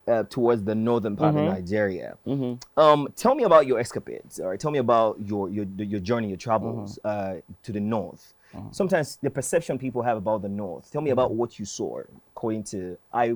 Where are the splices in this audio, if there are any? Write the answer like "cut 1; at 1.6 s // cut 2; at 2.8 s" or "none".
none